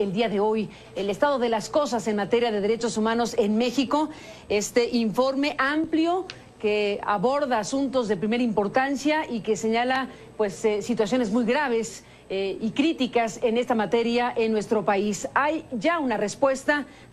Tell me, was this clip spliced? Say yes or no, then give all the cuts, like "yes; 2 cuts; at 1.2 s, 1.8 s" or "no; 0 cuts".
yes; 1 cut; at 9.3 s